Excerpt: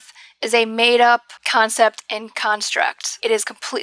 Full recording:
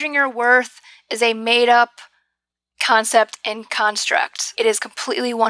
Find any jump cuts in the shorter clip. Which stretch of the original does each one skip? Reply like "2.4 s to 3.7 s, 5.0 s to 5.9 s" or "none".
2.0 s to 2.7 s